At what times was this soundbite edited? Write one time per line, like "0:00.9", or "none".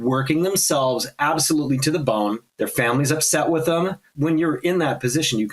0:02.5
0:04.1